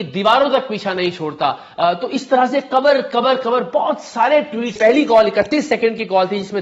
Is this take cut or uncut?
cut